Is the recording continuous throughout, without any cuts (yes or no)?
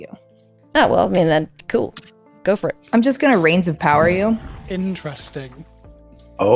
yes